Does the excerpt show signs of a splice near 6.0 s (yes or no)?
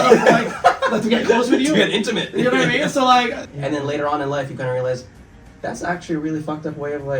no